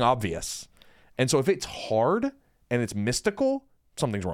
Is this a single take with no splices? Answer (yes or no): yes